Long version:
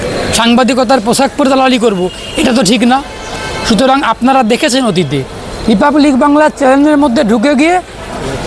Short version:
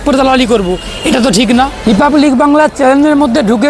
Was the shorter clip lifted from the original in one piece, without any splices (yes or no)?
no